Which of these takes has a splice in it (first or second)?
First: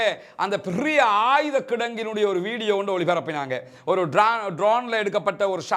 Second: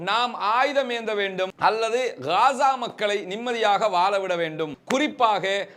second